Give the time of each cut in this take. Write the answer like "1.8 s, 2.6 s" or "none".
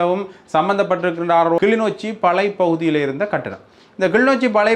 1.6 s